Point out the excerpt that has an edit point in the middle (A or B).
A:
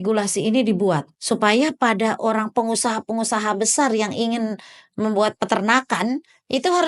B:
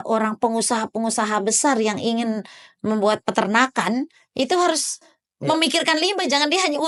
A